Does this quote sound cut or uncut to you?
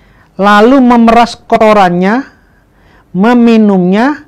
cut